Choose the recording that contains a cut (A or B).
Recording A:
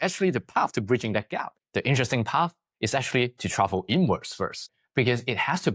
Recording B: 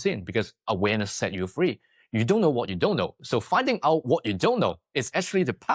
A